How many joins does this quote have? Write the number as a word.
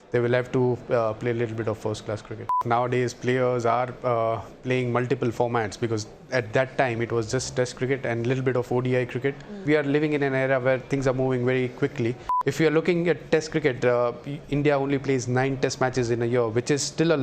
three